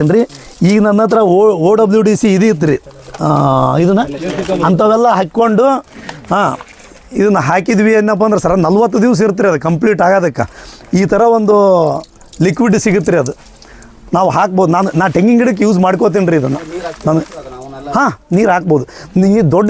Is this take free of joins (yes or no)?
yes